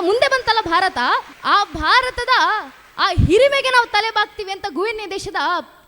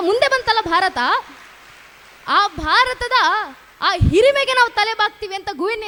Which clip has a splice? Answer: first; 1 cut; at 1.3 s

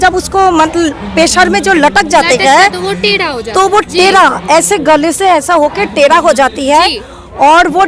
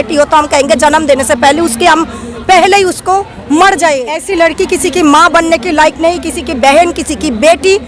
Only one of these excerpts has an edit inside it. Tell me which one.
second; 1 cut; at 4.2 s

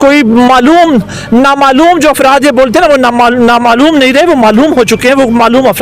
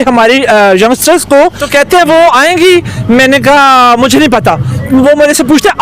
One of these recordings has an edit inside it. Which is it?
second; 1 cut; at 1.6 s

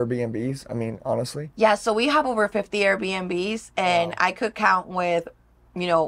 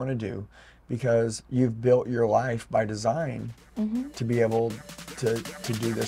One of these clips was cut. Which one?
first; 1 cut; at 1.4 s

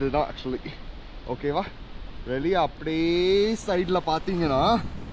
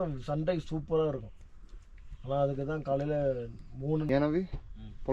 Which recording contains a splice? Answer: second; 1 cut; at 4.1 s

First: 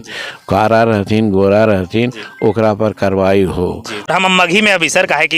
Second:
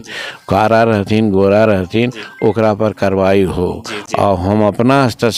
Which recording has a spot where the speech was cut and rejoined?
first; 1 cut; at 4.1 s

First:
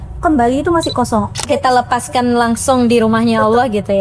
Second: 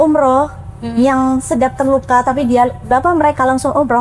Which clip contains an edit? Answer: first; 1 cut; at 1.4 s

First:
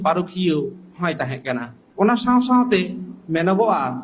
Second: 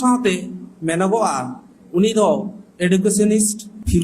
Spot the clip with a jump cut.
second; 1 cut; at 2.6 s

